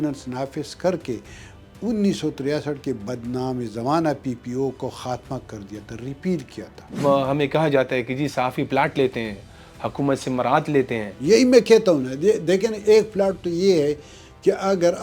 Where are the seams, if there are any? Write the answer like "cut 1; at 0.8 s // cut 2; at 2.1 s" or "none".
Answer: cut 1; at 7.0 s